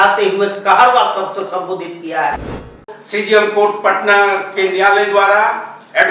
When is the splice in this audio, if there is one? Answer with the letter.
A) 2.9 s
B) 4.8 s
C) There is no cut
A